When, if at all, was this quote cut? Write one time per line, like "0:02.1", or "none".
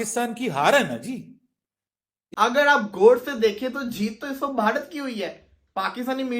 0:02.2

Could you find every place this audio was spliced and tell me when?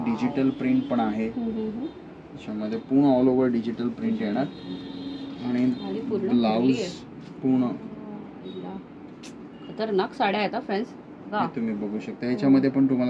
none

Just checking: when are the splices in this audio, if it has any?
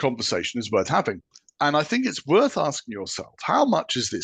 0:01.2

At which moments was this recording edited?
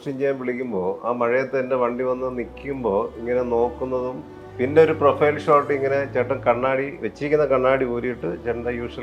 none

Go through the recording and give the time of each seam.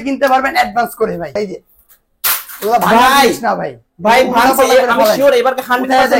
0:01.4

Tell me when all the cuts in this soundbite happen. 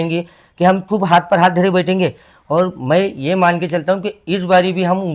none

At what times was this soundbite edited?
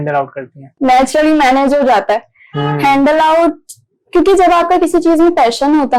none

